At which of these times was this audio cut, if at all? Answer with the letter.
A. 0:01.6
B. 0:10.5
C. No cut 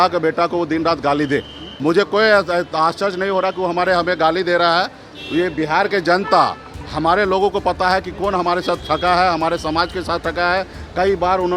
A